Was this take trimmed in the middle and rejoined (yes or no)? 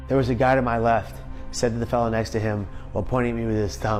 no